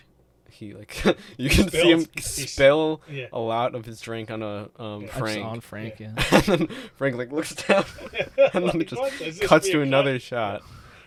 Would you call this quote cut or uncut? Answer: uncut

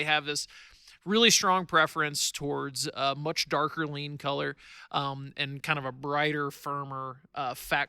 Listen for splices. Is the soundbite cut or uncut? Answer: uncut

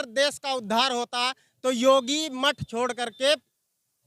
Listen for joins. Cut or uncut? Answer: uncut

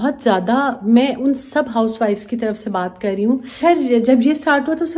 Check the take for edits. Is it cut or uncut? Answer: cut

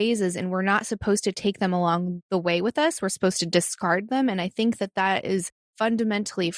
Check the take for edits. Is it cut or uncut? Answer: cut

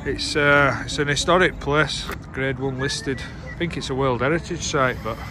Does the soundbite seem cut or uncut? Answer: cut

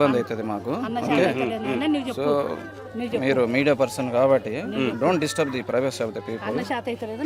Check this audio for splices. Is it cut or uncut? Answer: uncut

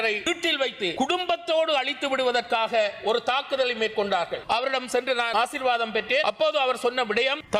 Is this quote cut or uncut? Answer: cut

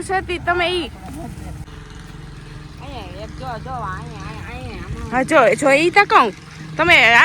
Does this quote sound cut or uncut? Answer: cut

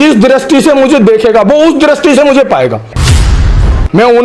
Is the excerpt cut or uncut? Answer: cut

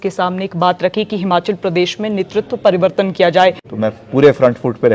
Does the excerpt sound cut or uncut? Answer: cut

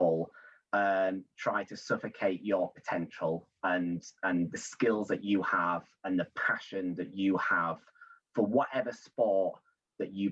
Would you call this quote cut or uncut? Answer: uncut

